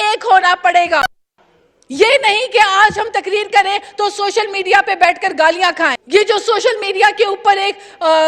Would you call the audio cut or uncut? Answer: cut